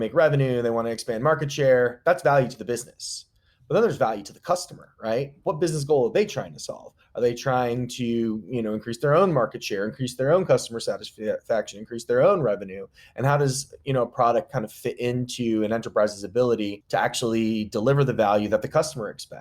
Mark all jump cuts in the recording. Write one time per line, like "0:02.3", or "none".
0:16.8

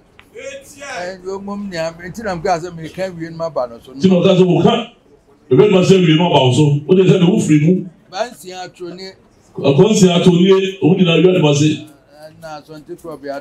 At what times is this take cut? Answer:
none

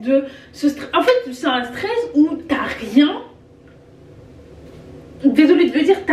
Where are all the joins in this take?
none

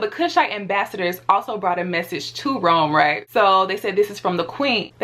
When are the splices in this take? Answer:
0:03.2

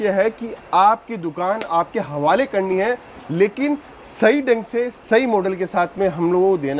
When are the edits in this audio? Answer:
none

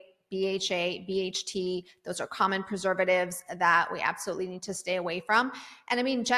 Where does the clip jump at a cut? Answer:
none

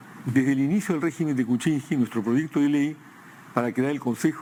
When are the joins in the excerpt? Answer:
none

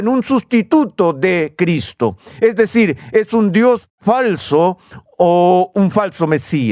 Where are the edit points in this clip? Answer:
none

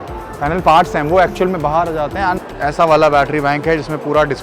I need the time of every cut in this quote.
0:02.4

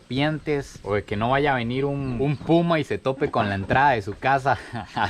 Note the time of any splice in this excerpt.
0:02.1

